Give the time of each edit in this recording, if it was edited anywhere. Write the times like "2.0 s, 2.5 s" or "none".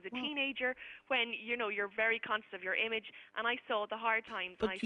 none

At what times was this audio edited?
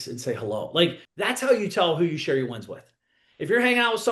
1.1 s

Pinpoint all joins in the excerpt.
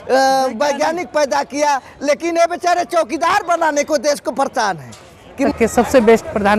5.5 s

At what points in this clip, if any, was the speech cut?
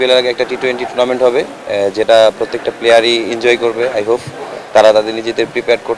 none

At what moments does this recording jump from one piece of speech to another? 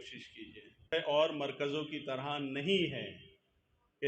0.9 s

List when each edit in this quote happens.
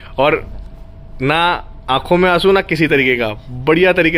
none

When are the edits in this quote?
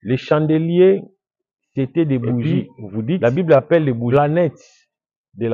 4.1 s

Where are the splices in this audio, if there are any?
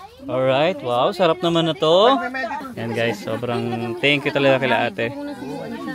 2.7 s

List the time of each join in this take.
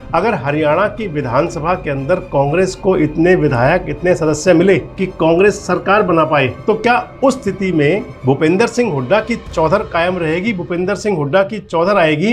5.0 s, 6.6 s, 8.1 s

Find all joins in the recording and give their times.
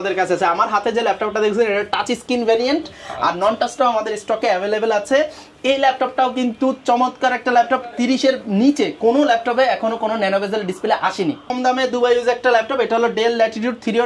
11.5 s

